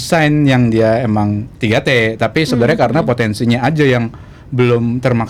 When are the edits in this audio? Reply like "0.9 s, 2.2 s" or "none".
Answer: none